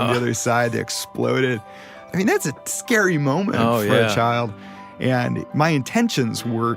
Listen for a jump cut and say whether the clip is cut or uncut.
cut